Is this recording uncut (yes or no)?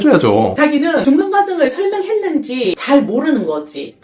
no